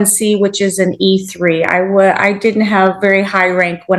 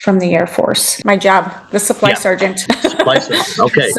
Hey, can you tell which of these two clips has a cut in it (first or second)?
second